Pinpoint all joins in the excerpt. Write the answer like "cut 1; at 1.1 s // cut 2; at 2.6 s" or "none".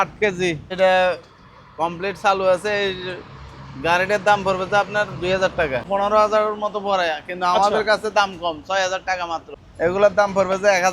cut 1; at 0.7 s // cut 2; at 5.9 s // cut 3; at 9.5 s